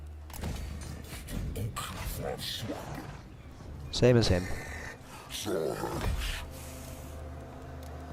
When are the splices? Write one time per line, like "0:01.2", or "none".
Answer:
none